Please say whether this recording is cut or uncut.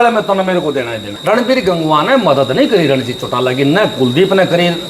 cut